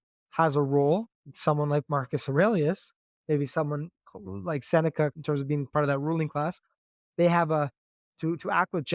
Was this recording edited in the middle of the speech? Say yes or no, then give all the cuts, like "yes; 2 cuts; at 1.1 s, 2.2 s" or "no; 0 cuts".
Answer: yes; 1 cut; at 5.2 s